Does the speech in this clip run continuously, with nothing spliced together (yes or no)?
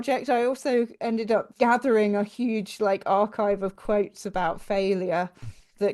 no